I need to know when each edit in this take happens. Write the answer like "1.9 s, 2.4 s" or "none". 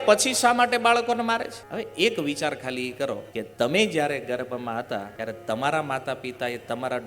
1.6 s, 3.4 s, 5.1 s